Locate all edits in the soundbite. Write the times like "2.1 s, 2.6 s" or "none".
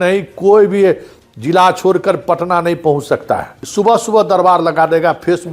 3.6 s